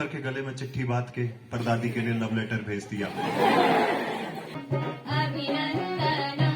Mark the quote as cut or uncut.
cut